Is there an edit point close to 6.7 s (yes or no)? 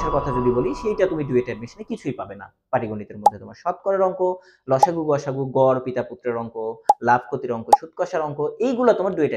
no